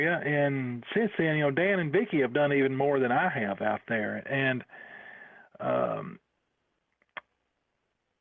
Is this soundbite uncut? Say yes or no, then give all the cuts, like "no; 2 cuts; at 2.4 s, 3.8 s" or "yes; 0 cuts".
no; 1 cut; at 1.5 s